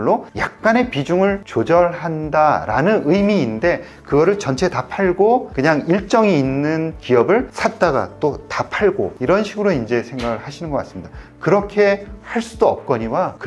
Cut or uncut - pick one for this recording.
uncut